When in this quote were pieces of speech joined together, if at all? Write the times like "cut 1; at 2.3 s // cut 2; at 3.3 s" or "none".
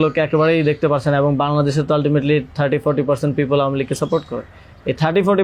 none